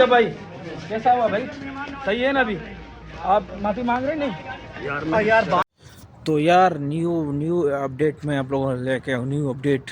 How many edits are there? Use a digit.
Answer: 1